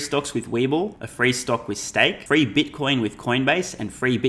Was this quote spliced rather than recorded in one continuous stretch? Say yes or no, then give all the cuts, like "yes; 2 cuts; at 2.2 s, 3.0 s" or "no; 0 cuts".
yes; 2 cuts; at 1.0 s, 2.2 s